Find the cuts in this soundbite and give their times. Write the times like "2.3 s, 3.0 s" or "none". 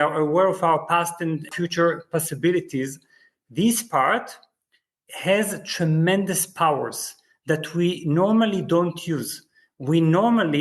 1.5 s